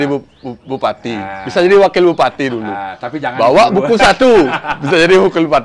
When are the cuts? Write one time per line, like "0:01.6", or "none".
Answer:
none